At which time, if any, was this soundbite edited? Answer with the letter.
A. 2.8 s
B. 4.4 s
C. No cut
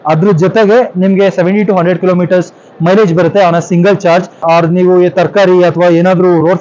B